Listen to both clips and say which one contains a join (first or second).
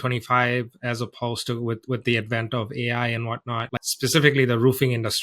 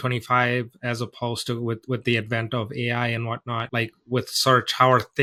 first